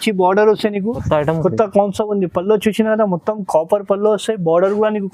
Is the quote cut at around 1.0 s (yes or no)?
yes